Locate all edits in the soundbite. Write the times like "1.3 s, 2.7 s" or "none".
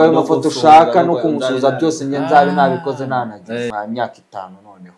3.7 s